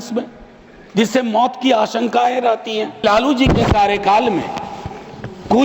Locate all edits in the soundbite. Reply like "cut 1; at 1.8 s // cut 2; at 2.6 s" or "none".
cut 1; at 3.0 s